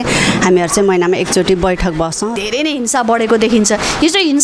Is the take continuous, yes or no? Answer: no